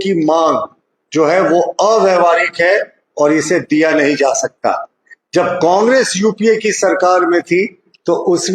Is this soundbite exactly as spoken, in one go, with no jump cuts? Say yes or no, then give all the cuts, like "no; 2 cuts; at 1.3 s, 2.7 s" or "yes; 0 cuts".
yes; 0 cuts